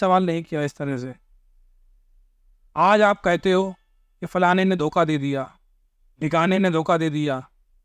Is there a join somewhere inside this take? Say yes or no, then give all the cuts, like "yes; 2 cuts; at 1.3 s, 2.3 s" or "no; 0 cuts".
no; 0 cuts